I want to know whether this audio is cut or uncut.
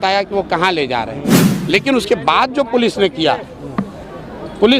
cut